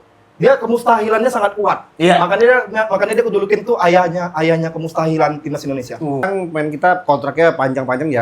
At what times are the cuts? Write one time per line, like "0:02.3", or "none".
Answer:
0:06.2